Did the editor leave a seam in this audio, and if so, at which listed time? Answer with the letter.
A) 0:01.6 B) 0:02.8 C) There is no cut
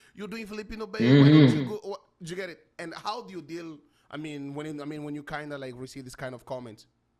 C